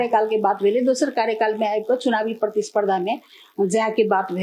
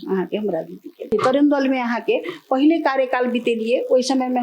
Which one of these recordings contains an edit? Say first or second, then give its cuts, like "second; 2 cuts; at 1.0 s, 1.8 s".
second; 1 cut; at 1.1 s